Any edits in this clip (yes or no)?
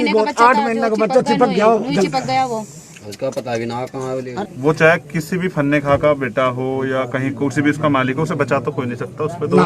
yes